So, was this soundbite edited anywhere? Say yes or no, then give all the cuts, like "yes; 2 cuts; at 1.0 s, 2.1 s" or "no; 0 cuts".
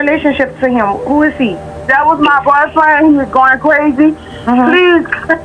no; 0 cuts